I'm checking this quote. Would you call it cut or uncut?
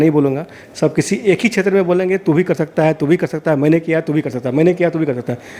uncut